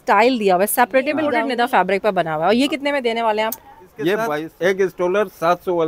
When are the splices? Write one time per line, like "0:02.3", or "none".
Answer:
0:01.3
0:04.4